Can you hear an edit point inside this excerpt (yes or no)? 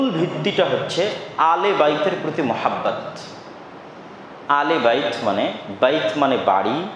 no